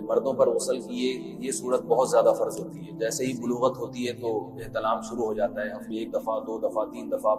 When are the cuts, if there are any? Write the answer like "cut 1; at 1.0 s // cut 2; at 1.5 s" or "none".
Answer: cut 1; at 5.8 s

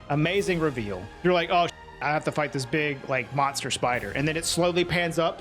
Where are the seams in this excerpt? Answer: cut 1; at 1.1 s

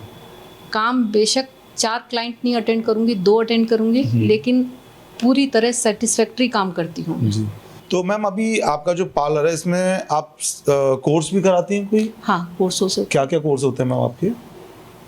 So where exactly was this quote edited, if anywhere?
cut 1; at 7.7 s

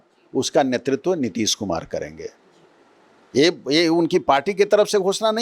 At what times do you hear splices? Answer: none

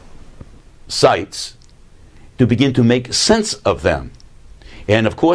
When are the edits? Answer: cut 1; at 3.2 s

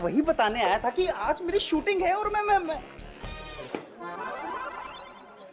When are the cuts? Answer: none

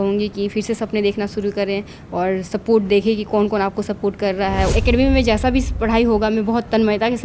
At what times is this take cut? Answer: cut 1; at 4.7 s

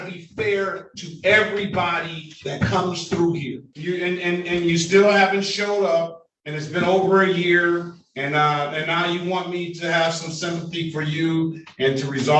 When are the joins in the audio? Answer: cut 1; at 3.6 s

